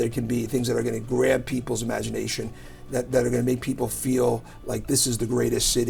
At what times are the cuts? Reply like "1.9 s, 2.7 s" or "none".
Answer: none